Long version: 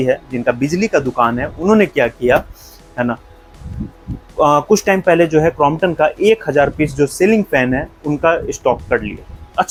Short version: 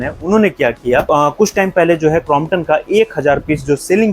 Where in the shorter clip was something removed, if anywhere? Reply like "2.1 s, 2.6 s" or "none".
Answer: 1.1 s